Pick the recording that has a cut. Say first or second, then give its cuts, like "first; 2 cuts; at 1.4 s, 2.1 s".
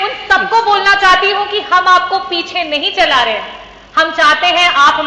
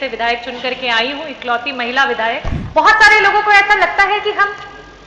second; 1 cut; at 2.6 s